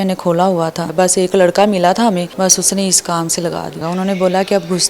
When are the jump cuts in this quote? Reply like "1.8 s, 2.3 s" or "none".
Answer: 0.8 s, 2.3 s, 3.8 s